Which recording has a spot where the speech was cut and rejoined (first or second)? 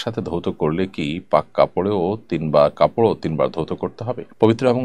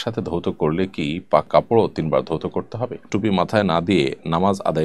second